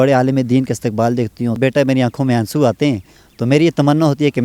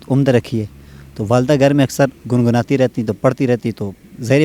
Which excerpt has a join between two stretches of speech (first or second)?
first